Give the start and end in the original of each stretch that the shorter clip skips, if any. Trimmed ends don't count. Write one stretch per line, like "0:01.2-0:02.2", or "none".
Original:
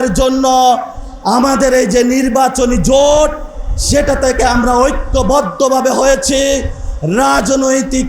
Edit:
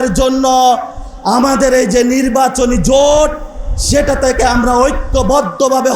none